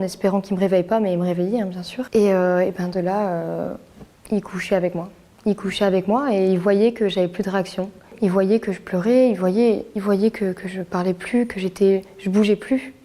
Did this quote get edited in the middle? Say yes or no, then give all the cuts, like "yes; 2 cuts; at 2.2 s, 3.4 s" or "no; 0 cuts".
no; 0 cuts